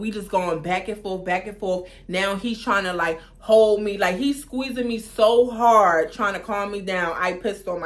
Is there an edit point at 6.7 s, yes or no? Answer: no